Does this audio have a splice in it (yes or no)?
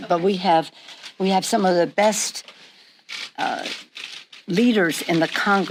no